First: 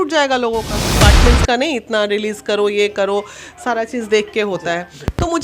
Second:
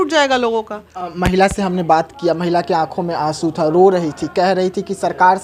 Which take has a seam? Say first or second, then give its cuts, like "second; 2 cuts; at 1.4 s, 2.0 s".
first; 1 cut; at 1.0 s